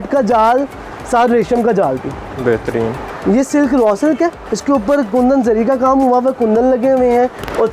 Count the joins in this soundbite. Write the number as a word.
two